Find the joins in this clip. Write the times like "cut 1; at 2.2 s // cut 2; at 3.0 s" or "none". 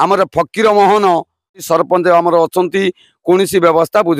cut 1; at 1.6 s